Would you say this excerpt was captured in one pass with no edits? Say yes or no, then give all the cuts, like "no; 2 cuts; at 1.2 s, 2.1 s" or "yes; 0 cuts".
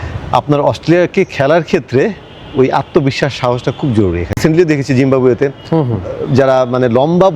no; 1 cut; at 4.4 s